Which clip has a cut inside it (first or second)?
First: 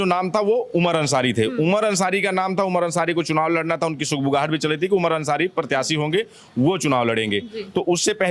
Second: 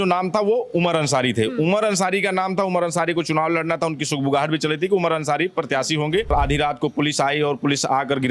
second